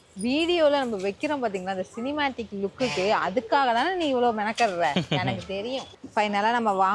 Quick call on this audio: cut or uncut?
cut